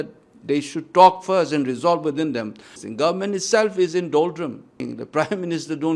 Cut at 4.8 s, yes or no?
yes